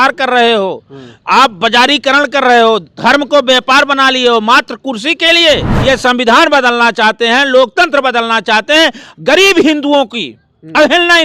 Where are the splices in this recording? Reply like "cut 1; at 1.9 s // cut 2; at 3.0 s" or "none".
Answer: cut 1; at 5.7 s